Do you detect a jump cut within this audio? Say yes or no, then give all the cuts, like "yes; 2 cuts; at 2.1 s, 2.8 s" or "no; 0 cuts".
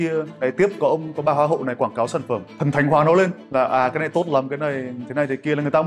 no; 0 cuts